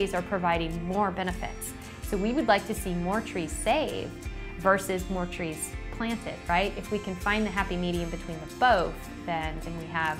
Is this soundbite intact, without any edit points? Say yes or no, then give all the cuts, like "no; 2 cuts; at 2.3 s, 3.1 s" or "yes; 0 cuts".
yes; 0 cuts